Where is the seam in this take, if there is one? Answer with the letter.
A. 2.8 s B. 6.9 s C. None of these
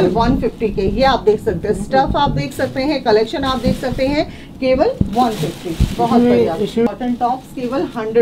B